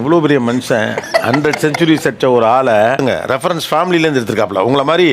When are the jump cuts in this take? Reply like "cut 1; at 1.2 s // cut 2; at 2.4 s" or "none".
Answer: cut 1; at 3.0 s